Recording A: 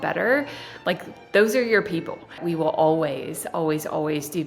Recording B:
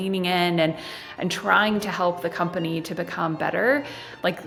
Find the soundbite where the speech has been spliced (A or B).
A